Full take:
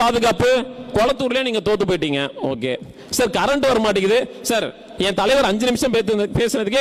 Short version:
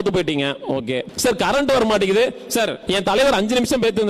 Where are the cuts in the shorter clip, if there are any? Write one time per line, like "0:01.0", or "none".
0:01.1
0:02.8